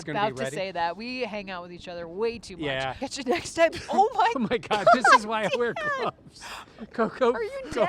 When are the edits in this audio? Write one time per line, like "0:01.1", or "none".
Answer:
0:03.0